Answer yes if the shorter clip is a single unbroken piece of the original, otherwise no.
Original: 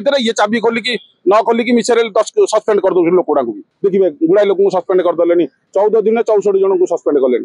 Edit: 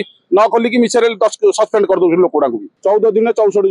no